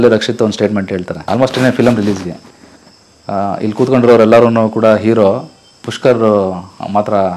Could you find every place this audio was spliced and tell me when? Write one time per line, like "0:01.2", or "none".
0:01.1